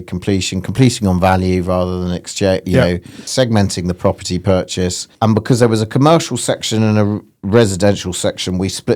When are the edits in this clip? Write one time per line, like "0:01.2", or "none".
0:03.3
0:05.0